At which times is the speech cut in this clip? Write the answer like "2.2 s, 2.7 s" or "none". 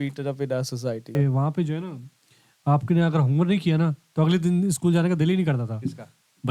1.1 s